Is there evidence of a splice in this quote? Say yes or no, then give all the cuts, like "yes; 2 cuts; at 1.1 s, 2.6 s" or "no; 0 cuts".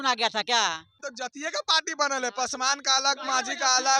yes; 1 cut; at 1.1 s